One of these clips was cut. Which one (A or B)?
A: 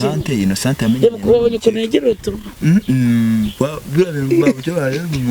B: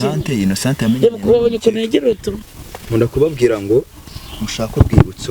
B